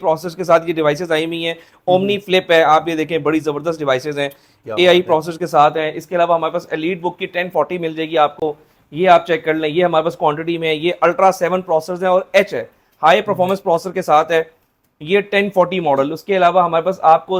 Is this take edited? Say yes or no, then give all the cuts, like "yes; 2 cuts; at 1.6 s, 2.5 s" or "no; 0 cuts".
no; 0 cuts